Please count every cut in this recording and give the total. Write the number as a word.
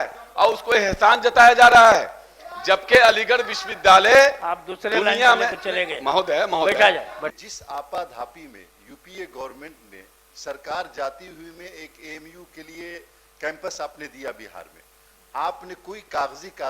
one